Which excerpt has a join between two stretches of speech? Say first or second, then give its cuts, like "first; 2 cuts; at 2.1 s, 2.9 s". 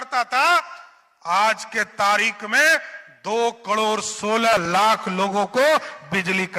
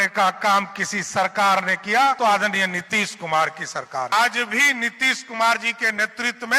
second; 2 cuts; at 2.2 s, 4.1 s